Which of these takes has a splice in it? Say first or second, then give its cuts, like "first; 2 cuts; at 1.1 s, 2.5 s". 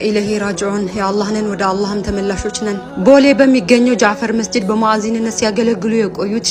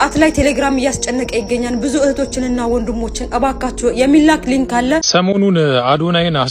second; 1 cut; at 5.1 s